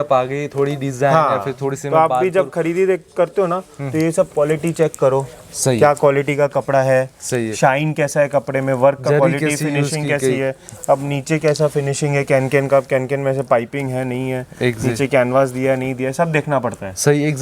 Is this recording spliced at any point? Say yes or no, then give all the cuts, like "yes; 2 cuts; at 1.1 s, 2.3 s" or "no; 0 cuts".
no; 0 cuts